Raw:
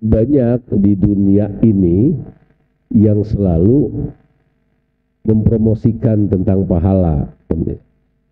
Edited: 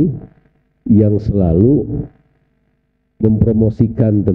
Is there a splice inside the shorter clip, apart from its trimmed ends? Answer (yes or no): no